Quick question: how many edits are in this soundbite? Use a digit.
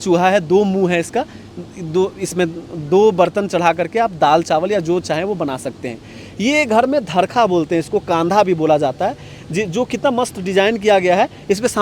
0